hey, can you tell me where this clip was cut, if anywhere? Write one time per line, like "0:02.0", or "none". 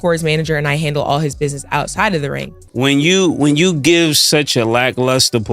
0:02.6